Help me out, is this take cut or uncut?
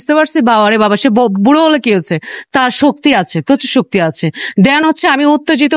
cut